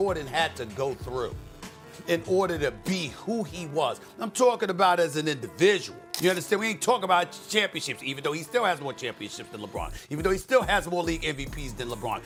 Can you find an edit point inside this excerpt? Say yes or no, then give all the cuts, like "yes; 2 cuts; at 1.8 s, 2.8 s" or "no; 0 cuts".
no; 0 cuts